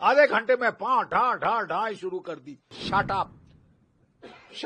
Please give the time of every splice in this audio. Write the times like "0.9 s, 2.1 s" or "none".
2.8 s